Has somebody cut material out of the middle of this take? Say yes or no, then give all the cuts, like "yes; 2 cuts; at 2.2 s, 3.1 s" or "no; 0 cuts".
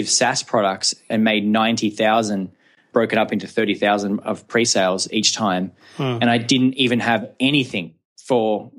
no; 0 cuts